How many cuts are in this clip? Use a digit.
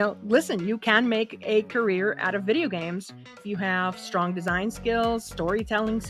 1